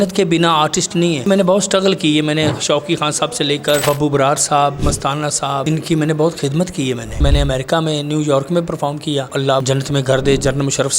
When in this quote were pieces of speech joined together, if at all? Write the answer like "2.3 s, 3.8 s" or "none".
1.3 s, 3.8 s, 5.6 s, 7.2 s, 9.4 s